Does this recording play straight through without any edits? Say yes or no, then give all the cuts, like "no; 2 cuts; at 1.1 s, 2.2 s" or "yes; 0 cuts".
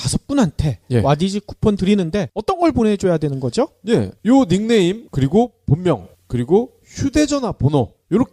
no; 1 cut; at 1.8 s